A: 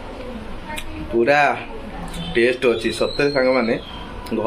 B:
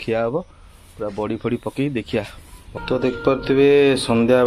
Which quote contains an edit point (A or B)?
B